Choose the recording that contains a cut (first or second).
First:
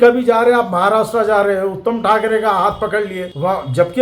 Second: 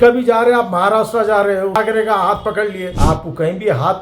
second